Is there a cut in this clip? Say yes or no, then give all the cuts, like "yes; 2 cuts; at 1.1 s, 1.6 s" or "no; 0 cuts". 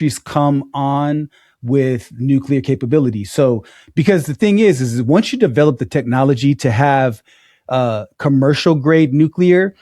no; 0 cuts